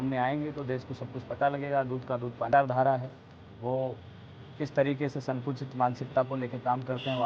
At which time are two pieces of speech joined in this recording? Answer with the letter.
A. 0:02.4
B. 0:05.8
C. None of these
A